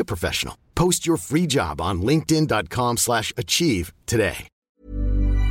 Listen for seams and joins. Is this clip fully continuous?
no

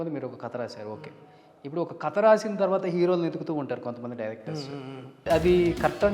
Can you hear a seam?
yes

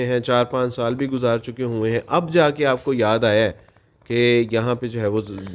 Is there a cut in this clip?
no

